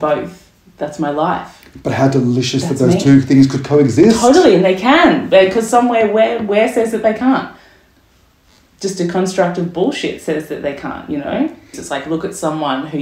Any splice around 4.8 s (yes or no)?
no